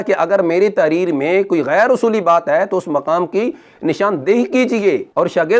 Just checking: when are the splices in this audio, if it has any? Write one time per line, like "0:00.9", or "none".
none